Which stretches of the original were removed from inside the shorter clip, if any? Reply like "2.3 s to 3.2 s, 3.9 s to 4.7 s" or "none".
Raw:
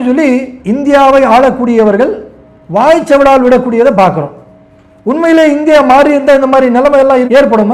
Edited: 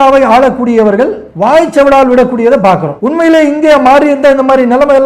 2.3 s to 2.6 s, 4.3 s to 5.0 s